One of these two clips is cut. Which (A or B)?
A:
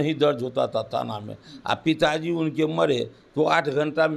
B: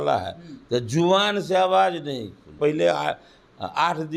B